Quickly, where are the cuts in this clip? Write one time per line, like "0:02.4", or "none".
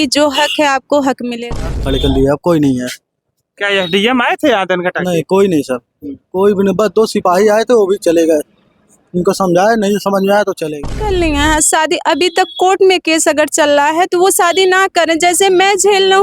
0:01.7
0:10.7